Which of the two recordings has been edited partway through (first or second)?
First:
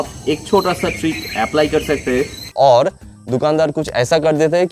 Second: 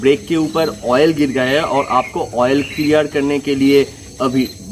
first